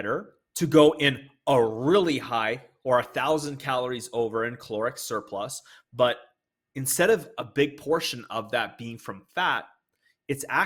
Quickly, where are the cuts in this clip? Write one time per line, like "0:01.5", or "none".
none

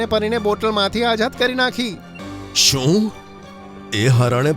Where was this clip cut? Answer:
0:02.2

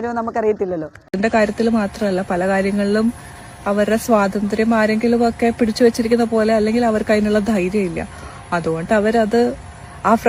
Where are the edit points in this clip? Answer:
0:01.0

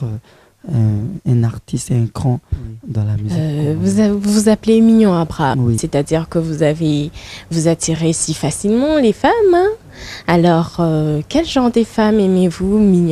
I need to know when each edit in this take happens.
0:03.2

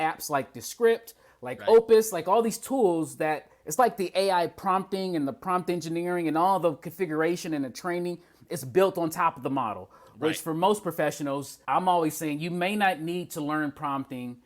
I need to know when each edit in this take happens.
0:11.5

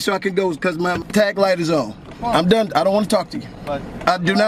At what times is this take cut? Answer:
0:01.0
0:02.1

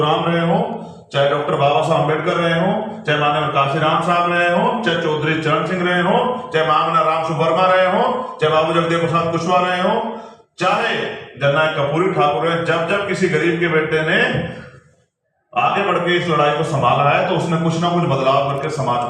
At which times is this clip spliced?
none

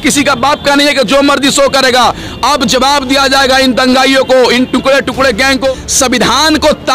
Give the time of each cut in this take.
0:05.7

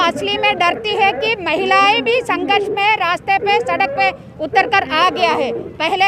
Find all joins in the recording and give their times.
none

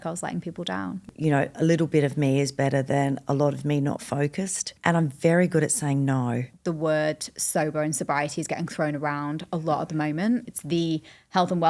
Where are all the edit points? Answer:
0:01.1
0:04.7
0:06.5
0:10.5

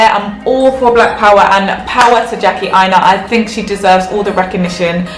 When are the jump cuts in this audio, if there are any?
none

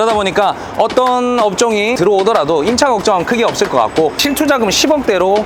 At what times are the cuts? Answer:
none

